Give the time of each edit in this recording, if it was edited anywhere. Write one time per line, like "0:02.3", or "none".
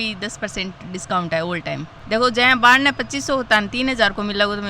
0:01.9